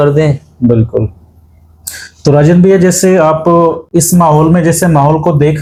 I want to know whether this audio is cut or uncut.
uncut